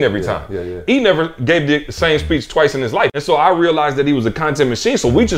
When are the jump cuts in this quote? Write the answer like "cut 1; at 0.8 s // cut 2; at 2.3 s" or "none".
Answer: cut 1; at 3.1 s